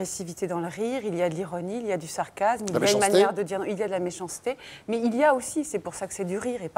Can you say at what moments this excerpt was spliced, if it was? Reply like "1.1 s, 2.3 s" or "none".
none